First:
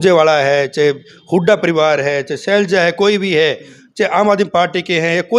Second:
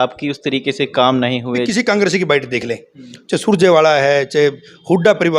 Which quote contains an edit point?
second; 1 cut; at 1.7 s

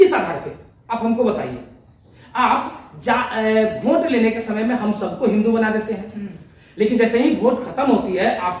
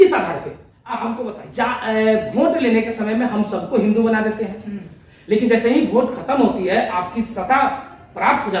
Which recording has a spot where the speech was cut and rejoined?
second; 1 cut; at 1.1 s

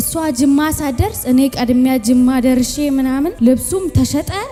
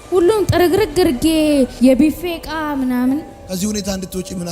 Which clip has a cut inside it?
second; 1 cut; at 3.4 s

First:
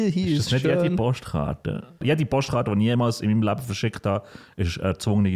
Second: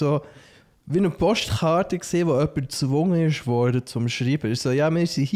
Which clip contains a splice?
first; 1 cut; at 2.0 s

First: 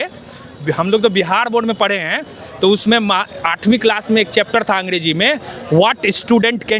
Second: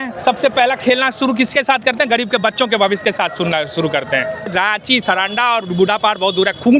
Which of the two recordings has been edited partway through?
second; 1 cut; at 4.5 s

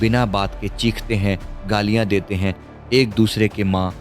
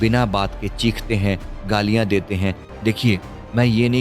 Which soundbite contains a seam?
second; 1 cut; at 2.7 s

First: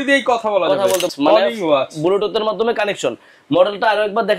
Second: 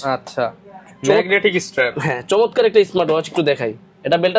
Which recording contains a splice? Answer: first; 1 cut; at 1.1 s

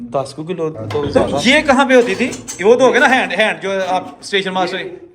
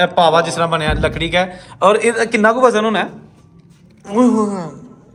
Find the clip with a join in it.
first; 1 cut; at 1.2 s

